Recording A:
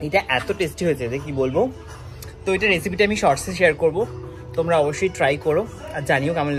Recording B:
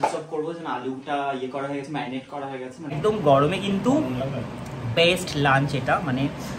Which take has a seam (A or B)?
B